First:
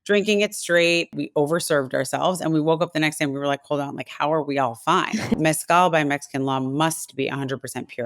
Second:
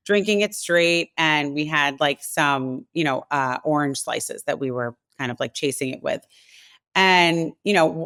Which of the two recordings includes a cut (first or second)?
first